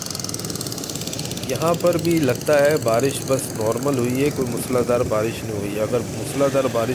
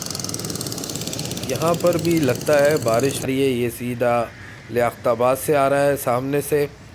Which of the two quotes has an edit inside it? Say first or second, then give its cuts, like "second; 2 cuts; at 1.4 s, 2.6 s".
second; 1 cut; at 3.3 s